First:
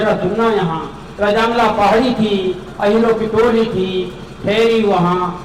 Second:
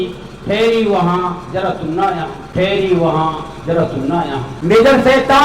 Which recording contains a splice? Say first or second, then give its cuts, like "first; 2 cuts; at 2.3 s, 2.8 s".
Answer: second; 2 cuts; at 2.4 s, 4.5 s